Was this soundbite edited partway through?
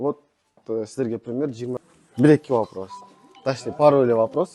yes; 1 cut; at 1.8 s

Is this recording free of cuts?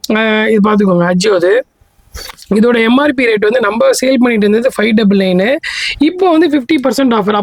yes; 0 cuts

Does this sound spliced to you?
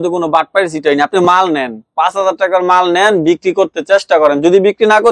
no; 0 cuts

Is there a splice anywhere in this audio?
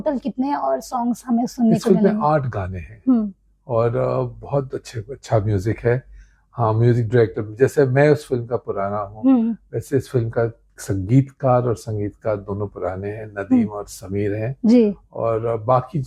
no; 0 cuts

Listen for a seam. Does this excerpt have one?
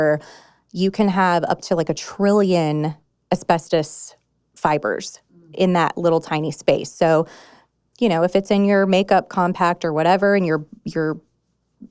no; 0 cuts

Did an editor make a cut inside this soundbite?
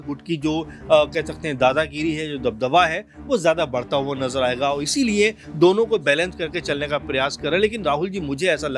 no; 0 cuts

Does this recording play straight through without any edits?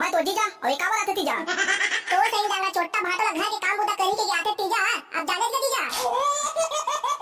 yes; 0 cuts

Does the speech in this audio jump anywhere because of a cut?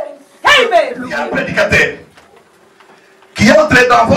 yes; 1 cut; at 1.3 s

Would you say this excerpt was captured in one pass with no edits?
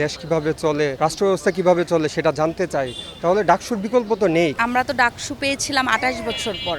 no; 2 cuts; at 0.9 s, 4.5 s

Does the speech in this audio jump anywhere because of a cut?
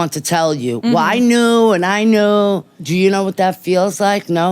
yes; 1 cut; at 2.8 s

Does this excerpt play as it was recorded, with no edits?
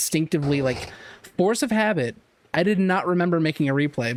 yes; 0 cuts

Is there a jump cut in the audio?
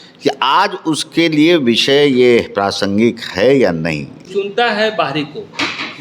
yes; 1 cut; at 4.4 s

